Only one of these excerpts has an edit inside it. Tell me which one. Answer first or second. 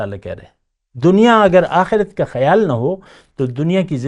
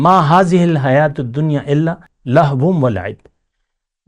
second